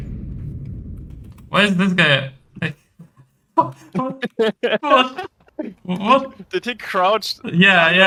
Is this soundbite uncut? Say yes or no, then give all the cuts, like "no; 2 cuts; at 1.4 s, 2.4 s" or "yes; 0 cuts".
yes; 0 cuts